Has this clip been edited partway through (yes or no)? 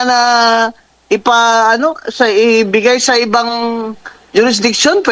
no